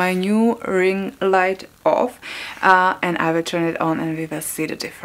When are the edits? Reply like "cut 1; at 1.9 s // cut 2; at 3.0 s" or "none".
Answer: none